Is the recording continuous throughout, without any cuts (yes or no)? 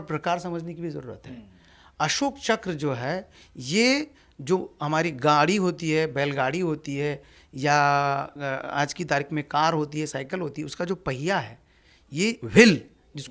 yes